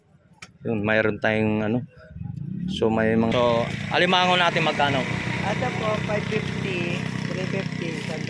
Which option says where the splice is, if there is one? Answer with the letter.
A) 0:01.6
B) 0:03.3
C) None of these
B